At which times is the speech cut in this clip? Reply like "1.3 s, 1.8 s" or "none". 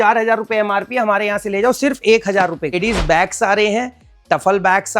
2.7 s